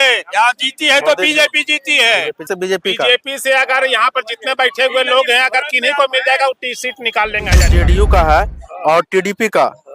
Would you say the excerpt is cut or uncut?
cut